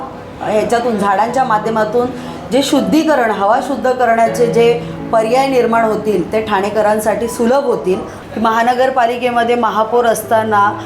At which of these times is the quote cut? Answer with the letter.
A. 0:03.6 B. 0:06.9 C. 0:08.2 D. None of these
C